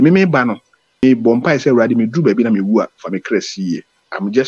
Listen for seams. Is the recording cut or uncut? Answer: cut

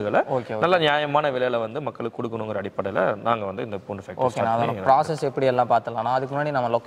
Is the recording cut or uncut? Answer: uncut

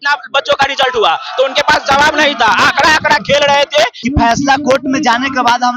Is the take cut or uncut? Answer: cut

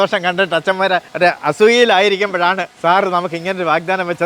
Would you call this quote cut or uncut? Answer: cut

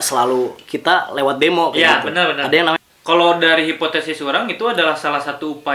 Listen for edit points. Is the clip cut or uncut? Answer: cut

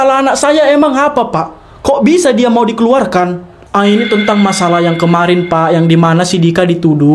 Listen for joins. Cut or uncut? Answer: uncut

